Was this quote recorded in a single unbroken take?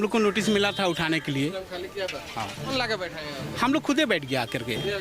no; 1 cut; at 2.8 s

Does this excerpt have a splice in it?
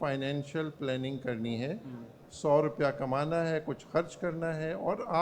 no; 0 cuts

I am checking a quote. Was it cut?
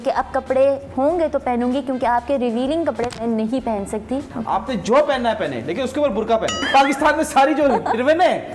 yes; 2 cuts; at 4.3 s, 6.6 s

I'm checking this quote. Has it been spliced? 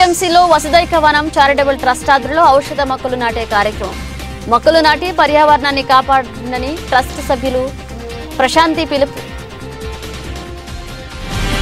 yes; 1 cut; at 9.1 s

